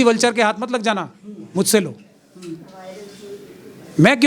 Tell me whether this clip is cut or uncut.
uncut